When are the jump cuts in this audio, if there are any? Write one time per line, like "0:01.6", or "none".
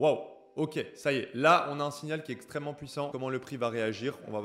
0:03.1